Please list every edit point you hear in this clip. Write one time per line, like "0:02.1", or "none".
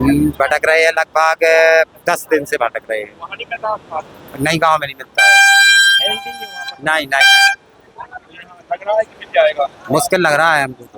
none